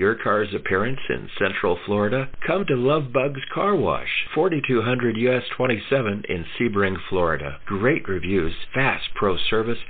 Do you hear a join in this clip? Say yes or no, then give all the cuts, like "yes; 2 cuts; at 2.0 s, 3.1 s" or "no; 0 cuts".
no; 0 cuts